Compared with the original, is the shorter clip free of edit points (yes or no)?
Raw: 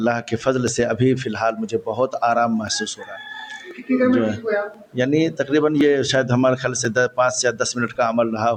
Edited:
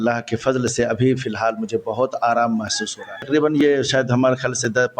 no